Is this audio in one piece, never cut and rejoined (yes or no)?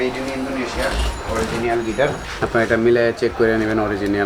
no